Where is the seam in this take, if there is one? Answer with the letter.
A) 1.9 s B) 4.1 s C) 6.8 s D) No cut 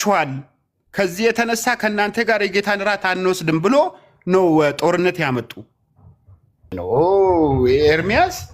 C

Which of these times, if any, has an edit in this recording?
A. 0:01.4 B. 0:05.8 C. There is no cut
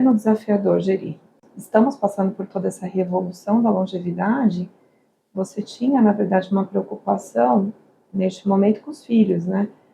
A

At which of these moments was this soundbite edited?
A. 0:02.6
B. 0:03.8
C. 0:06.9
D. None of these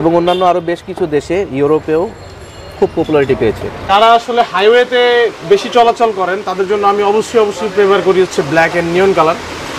B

